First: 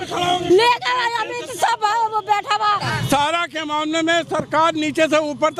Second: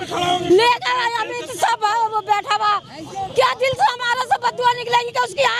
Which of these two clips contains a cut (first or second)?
first